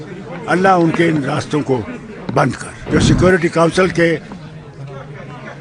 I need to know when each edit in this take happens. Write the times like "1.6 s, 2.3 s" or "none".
2.7 s